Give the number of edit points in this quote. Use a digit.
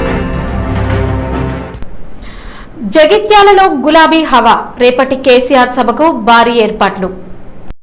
0